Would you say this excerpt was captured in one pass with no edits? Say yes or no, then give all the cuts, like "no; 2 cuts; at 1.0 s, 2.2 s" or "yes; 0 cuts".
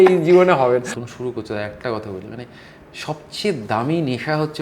no; 1 cut; at 0.9 s